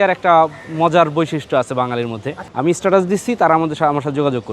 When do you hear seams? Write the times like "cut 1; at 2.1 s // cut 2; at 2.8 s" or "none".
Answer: cut 1; at 2.3 s